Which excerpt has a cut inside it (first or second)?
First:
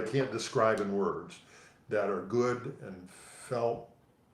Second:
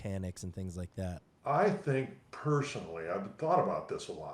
second